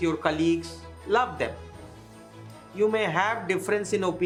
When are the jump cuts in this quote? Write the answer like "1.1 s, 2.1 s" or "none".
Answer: none